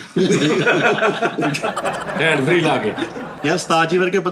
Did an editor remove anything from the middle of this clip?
yes; 1 cut; at 3.2 s

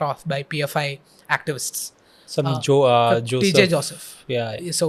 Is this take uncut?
yes; 0 cuts

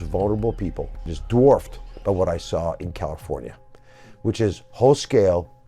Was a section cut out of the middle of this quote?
yes; 1 cut; at 1.1 s

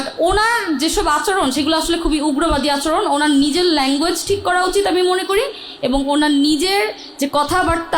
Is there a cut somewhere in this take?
no; 0 cuts

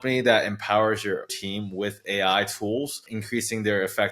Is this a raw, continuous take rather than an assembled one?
no; 2 cuts; at 1.4 s, 3.1 s

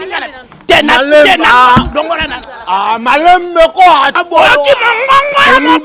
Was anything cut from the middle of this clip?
yes; 1 cut; at 4.2 s

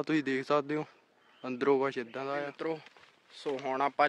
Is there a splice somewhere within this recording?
yes; 1 cut; at 2.5 s

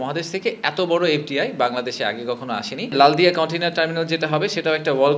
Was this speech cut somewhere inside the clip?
yes; 1 cut; at 2.9 s

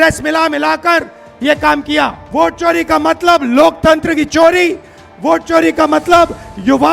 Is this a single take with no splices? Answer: no; 1 cut; at 2.2 s

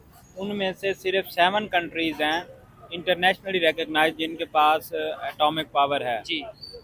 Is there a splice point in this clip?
no; 0 cuts

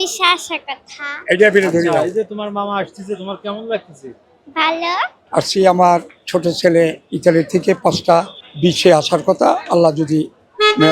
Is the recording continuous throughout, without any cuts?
no; 1 cut; at 5.2 s

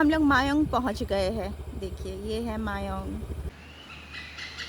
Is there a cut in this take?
yes; 1 cut; at 3.2 s

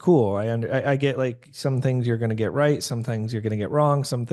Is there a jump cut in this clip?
no; 0 cuts

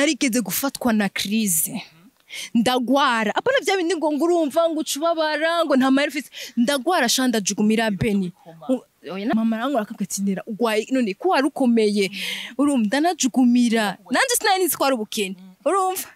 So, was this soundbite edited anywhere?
no; 0 cuts

